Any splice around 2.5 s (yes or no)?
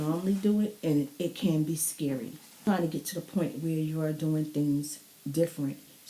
yes